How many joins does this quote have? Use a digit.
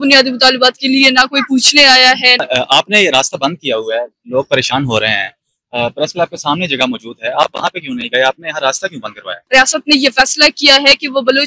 2